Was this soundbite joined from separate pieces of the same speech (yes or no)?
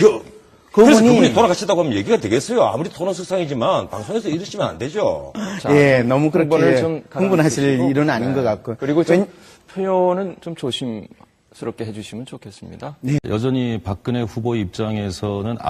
no